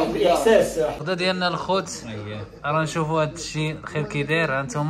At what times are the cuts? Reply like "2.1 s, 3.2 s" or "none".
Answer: 1.0 s